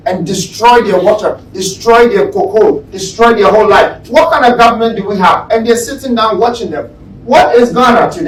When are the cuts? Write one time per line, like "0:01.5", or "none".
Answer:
none